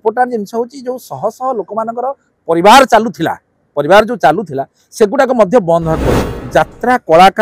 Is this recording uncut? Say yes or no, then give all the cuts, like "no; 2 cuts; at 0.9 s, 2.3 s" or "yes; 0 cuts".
no; 1 cut; at 6.4 s